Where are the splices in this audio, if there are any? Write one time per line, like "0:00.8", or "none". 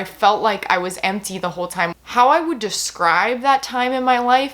0:01.9